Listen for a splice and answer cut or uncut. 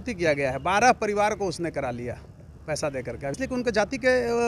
cut